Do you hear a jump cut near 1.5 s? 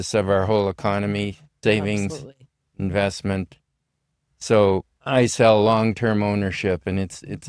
yes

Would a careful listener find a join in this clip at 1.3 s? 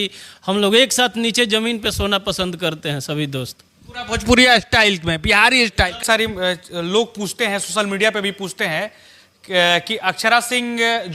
no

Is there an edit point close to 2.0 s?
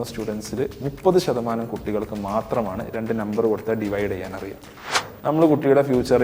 no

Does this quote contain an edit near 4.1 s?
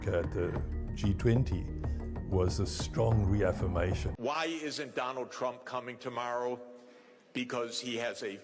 yes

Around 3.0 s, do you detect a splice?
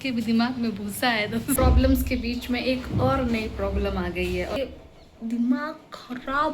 no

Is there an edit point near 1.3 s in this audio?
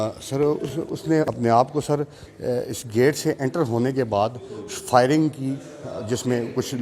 yes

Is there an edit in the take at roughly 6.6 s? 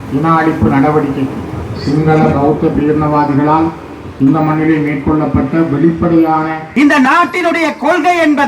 yes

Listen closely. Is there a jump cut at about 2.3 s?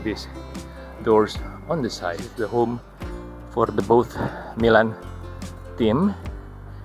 yes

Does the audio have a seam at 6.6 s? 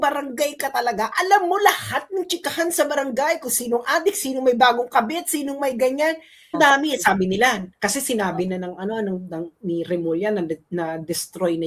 yes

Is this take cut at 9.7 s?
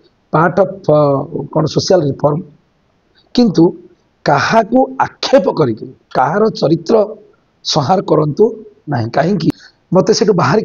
yes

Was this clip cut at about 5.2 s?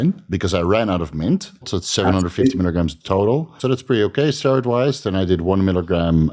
no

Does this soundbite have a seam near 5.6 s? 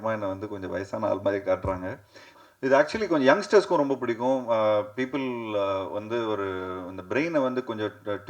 no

